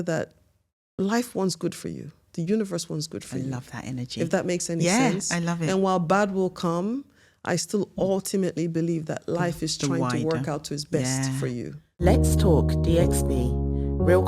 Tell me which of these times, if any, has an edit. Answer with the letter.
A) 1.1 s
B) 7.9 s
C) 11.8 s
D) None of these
C